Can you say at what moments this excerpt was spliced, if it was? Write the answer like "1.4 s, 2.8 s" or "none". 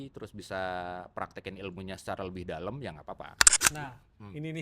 3.5 s

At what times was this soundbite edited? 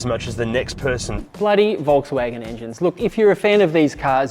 1.2 s

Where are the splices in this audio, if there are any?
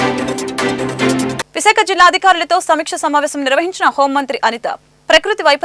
1.4 s

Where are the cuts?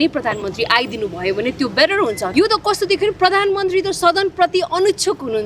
2.2 s

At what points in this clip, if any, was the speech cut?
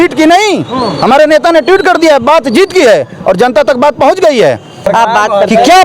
4.9 s

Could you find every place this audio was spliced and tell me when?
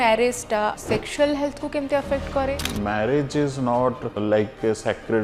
0.8 s, 2.6 s, 4.2 s

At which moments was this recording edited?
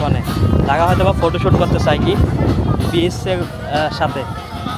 none

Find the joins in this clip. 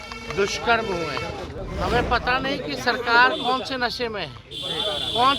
1.6 s

